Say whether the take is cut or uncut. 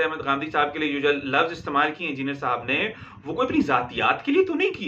uncut